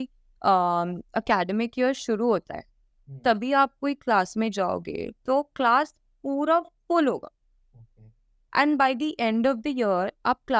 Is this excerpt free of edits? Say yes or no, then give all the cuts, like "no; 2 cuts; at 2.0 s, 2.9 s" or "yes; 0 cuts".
yes; 0 cuts